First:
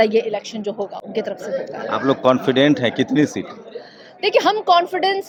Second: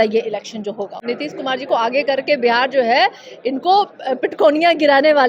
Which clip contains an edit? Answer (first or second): second